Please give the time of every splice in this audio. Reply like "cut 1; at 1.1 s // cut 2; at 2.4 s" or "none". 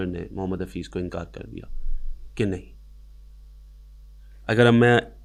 none